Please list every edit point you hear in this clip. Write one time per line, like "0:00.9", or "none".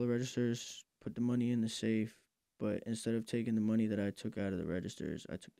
none